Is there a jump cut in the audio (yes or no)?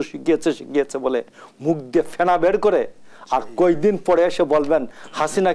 no